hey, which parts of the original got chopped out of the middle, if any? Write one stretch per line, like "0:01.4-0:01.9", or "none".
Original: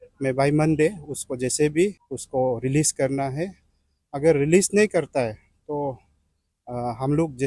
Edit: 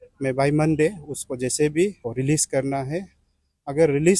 0:02.1-0:02.6